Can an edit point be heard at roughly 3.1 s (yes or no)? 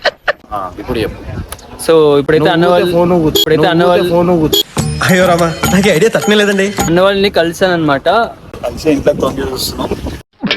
no